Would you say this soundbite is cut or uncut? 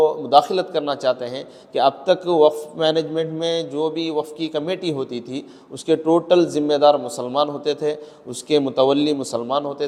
uncut